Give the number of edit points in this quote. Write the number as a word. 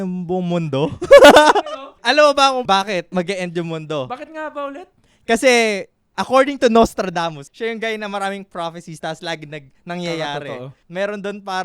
four